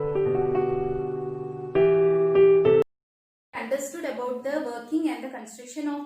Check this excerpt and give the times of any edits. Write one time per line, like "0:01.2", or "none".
0:02.8